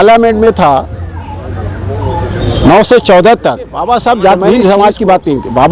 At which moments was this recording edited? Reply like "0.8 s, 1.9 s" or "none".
3.8 s